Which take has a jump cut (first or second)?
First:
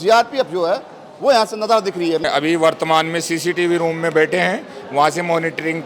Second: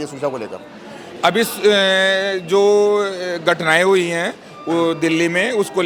first